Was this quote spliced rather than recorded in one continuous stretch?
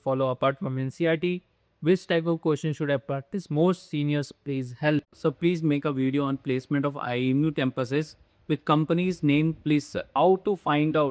yes; 2 cuts; at 5.2 s, 10.0 s

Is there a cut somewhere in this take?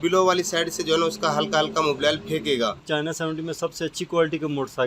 yes; 1 cut; at 2.8 s

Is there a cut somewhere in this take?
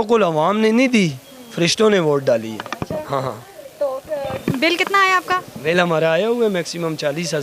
no; 0 cuts

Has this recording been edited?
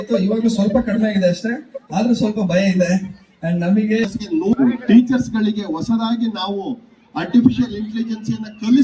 yes; 1 cut; at 4.1 s

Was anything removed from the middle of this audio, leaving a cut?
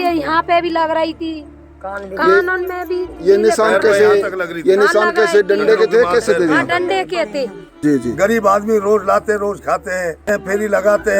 yes; 2 cuts; at 7.7 s, 10.3 s

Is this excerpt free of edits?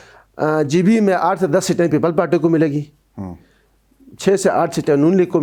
yes; 0 cuts

